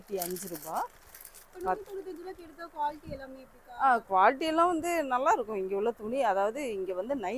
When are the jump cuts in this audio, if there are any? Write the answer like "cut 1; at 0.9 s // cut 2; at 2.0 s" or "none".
none